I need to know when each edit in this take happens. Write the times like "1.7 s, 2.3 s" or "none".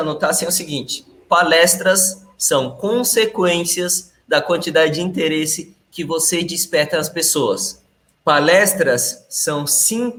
none